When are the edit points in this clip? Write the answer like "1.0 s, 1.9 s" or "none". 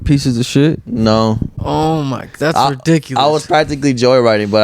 1.5 s